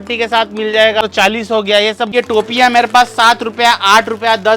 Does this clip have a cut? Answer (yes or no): yes